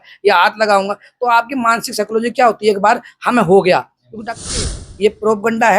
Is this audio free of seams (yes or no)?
no